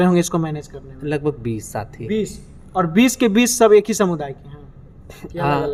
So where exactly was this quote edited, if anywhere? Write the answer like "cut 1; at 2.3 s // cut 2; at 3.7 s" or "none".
none

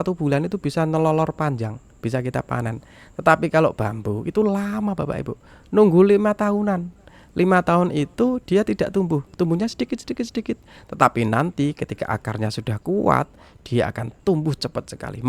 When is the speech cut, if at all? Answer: none

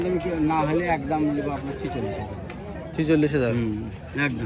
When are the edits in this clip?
none

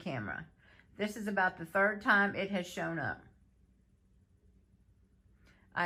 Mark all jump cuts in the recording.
none

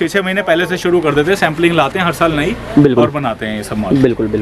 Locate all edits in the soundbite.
none

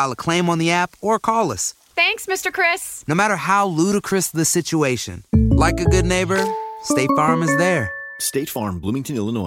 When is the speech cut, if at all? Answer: none

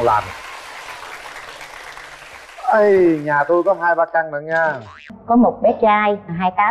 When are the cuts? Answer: cut 1; at 5.1 s

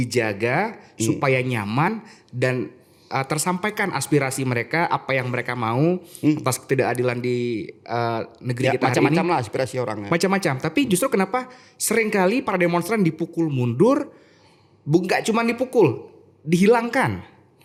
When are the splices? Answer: none

